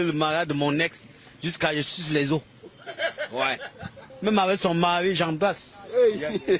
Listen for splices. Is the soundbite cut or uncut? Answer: cut